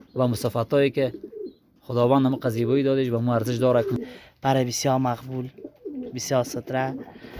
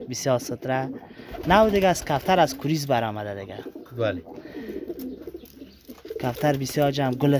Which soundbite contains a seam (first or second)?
first